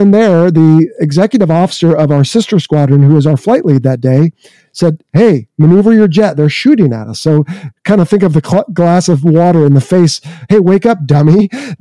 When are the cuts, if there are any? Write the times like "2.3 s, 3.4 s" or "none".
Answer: none